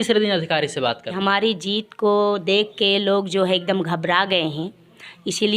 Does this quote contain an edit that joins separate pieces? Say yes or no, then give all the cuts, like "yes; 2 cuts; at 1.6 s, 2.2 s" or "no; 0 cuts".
yes; 1 cut; at 1.2 s